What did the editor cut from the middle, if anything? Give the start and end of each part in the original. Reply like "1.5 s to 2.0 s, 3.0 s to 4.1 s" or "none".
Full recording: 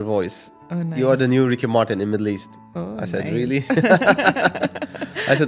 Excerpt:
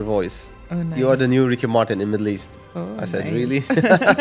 none